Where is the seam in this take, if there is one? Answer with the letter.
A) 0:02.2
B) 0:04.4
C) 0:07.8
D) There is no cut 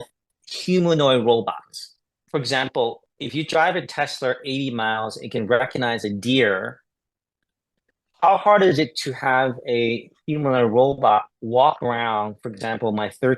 A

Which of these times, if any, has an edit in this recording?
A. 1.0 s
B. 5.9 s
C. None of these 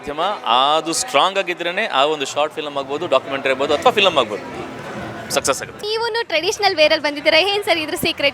B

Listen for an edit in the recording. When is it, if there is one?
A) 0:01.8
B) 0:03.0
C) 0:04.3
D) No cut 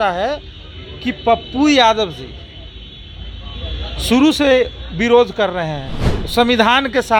D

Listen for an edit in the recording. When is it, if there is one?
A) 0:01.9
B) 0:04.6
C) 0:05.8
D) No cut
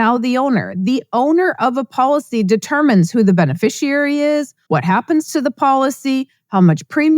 B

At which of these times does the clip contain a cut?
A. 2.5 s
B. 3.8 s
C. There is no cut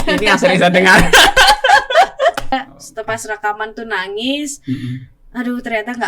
A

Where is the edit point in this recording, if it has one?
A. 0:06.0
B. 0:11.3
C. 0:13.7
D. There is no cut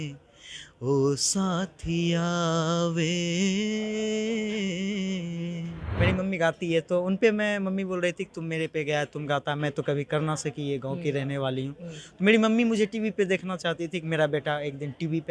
A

